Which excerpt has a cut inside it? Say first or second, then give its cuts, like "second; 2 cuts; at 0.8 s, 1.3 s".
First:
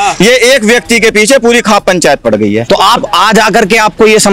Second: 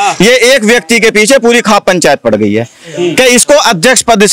first; 1 cut; at 2.6 s